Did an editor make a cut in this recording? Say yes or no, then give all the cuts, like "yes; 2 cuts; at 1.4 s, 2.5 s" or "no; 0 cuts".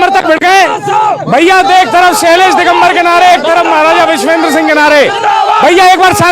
no; 0 cuts